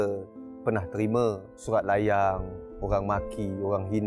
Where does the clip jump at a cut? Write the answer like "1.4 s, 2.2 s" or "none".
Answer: 1.5 s